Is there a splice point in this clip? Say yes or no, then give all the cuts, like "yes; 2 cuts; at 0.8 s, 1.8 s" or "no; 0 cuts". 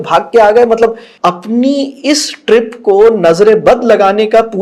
yes; 1 cut; at 1.1 s